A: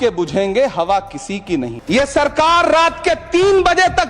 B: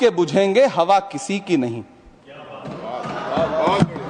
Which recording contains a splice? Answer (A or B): A